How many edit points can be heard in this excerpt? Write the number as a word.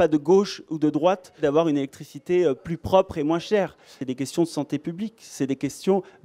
two